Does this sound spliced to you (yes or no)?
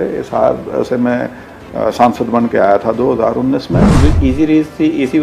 yes